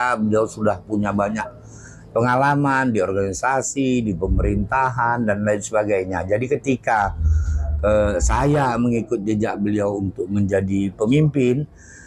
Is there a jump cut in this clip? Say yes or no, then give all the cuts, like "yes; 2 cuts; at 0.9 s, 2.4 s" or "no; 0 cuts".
no; 0 cuts